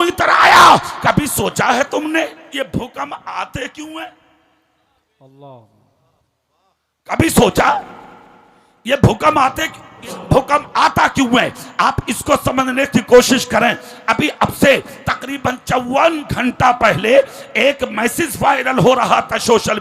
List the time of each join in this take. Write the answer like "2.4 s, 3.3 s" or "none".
10.1 s